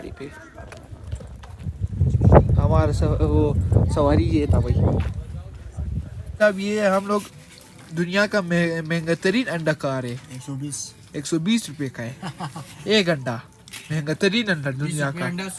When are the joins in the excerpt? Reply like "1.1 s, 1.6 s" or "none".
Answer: 6.2 s